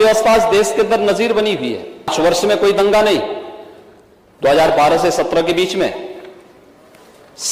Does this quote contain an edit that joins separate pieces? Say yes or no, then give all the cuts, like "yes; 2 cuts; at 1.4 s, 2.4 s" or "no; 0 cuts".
yes; 1 cut; at 2.1 s